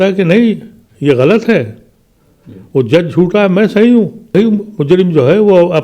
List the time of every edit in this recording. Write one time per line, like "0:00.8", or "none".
0:04.3

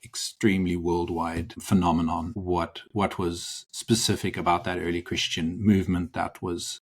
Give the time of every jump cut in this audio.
0:01.5
0:02.3

